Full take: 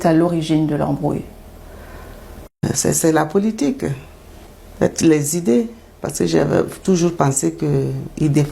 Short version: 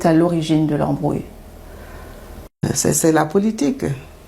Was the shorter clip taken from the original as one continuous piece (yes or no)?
yes